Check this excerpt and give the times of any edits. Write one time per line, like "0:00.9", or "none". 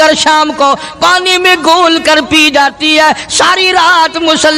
none